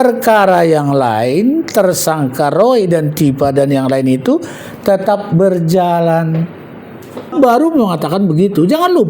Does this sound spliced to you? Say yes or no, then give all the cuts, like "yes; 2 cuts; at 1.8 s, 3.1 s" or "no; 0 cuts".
yes; 1 cut; at 7.3 s